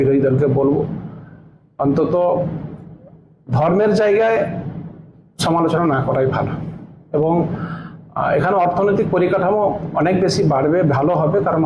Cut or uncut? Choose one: uncut